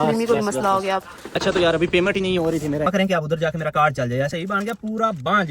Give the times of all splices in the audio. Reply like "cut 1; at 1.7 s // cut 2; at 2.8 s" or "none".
cut 1; at 2.9 s // cut 2; at 4.3 s